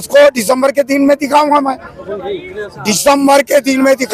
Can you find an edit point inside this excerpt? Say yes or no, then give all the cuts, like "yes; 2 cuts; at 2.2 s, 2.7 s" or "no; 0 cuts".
no; 0 cuts